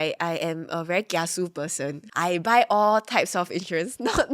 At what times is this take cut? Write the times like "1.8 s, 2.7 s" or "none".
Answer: 2.0 s